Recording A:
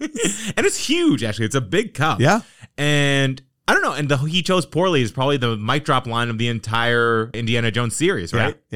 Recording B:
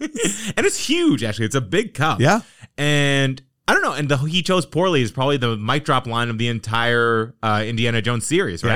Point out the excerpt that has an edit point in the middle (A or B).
A